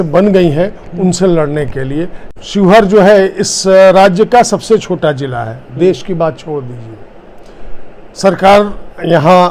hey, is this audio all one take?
no; 1 cut; at 2.2 s

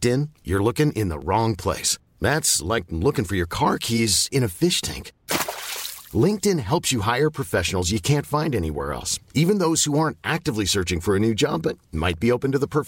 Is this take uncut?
yes; 0 cuts

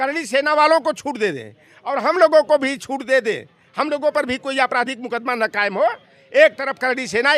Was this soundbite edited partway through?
no; 0 cuts

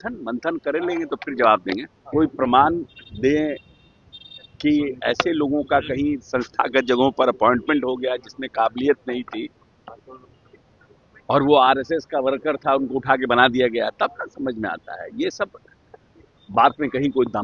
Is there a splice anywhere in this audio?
yes; 1 cut; at 1.9 s

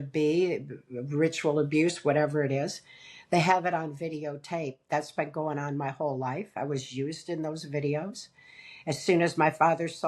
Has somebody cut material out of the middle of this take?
no; 0 cuts

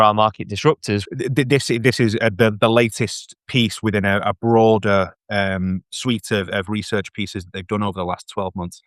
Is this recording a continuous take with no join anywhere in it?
no; 1 cut; at 1.0 s

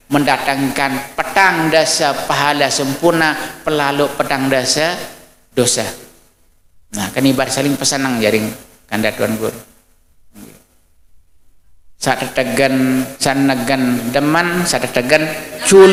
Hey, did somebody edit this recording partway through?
no; 0 cuts

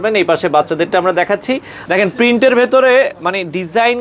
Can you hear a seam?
yes; 1 cut; at 1.7 s

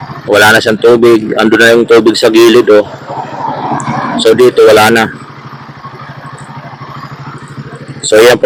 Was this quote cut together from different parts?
no; 0 cuts

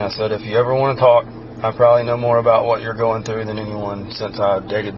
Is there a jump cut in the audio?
no; 0 cuts

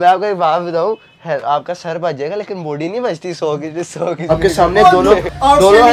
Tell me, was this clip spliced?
yes; 1 cut; at 4.3 s

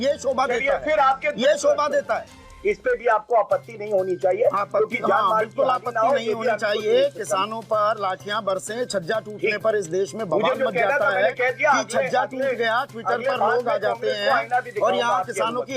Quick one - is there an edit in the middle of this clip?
yes; 1 cut; at 2.4 s

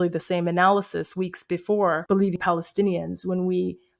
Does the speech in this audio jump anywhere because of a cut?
yes; 1 cut; at 2.1 s

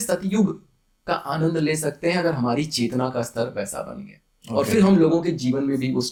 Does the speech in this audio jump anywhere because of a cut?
no; 0 cuts

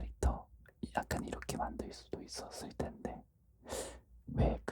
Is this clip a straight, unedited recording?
yes; 0 cuts

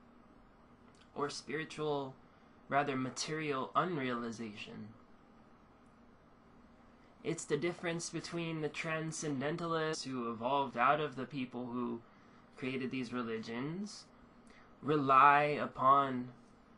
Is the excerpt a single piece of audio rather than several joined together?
yes; 0 cuts

